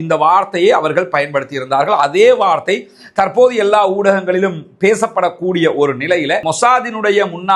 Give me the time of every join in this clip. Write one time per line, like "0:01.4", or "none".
0:06.4